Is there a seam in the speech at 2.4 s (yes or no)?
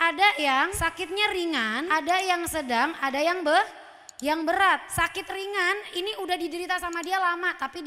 no